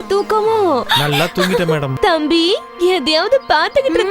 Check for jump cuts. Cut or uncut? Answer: cut